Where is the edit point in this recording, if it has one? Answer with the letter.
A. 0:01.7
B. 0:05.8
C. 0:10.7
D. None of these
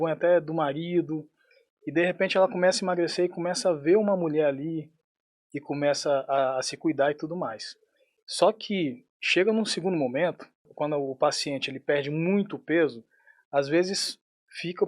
C